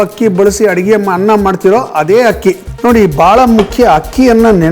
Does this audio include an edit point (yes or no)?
yes